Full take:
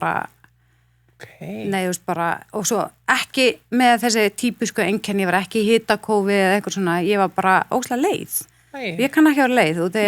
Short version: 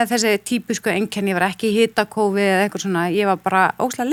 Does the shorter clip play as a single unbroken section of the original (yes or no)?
yes